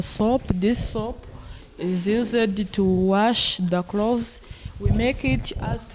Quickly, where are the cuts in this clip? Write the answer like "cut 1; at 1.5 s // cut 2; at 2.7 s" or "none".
none